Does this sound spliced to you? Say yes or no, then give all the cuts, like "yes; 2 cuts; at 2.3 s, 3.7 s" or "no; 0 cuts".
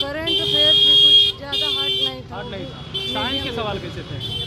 no; 0 cuts